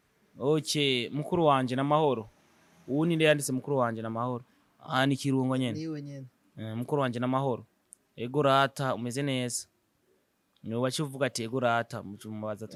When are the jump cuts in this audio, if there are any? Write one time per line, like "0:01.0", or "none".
none